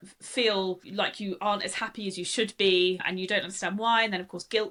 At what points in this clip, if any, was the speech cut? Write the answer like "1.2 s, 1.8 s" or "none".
none